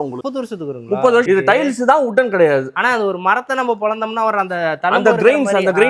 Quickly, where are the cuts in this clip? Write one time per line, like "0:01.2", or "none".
0:01.2